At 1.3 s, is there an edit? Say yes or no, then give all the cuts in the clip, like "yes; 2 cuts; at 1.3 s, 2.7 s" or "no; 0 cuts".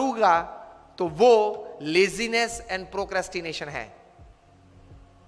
no; 1 cut; at 4.0 s